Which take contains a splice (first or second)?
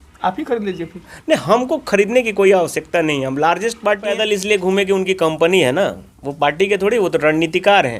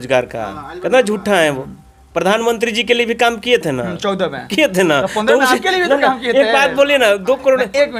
first